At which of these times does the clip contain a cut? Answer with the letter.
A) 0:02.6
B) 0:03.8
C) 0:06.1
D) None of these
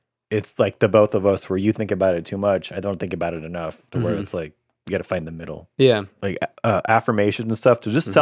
C